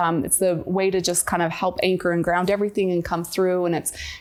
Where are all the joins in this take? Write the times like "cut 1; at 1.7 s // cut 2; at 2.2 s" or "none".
none